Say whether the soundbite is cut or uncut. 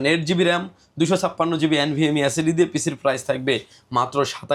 uncut